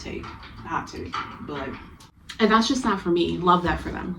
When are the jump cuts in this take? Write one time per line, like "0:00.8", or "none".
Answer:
0:02.1